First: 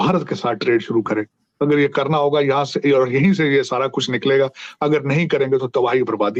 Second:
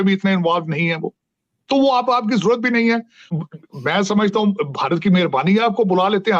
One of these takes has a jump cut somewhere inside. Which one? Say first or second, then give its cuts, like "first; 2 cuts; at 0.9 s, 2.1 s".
second; 1 cut; at 3.3 s